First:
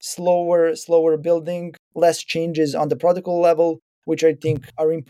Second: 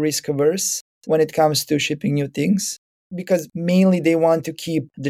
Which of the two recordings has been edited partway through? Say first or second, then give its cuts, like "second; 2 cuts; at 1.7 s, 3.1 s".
first; 1 cut; at 1.9 s